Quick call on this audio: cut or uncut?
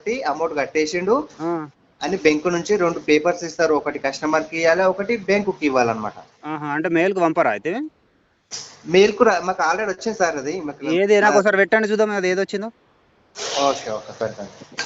uncut